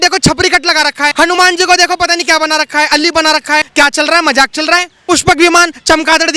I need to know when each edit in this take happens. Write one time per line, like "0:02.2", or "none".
0:01.1
0:03.7
0:04.9